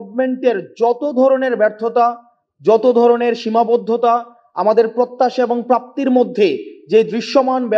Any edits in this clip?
no; 0 cuts

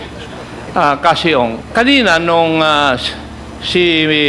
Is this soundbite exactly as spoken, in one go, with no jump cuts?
no; 1 cut; at 1.6 s

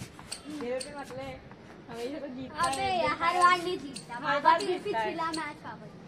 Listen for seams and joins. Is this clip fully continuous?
yes; 0 cuts

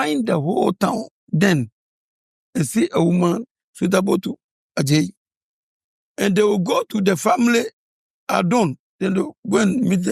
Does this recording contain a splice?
yes; 1 cut; at 8.8 s

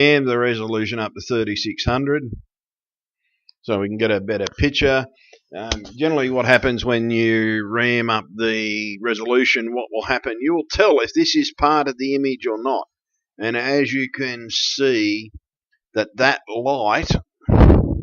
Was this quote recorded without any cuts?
yes; 0 cuts

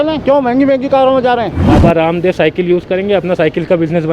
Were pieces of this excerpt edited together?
yes; 1 cut; at 1.6 s

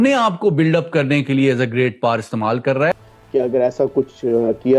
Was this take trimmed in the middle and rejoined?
yes; 1 cut; at 3.1 s

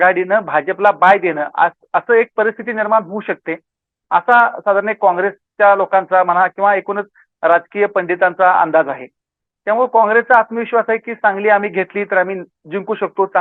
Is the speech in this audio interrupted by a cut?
no; 0 cuts

